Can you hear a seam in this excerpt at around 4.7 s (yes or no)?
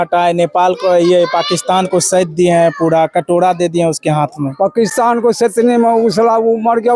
no